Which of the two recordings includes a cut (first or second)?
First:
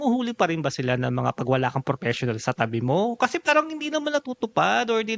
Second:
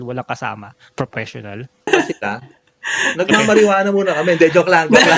second